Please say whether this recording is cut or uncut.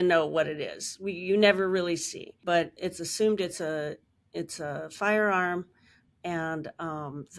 cut